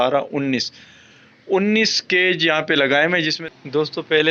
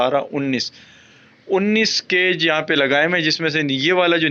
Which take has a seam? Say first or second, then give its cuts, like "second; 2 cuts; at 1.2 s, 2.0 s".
first; 1 cut; at 3.4 s